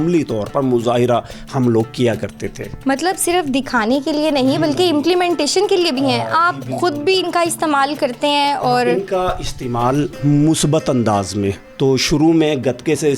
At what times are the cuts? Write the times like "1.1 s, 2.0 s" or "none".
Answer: none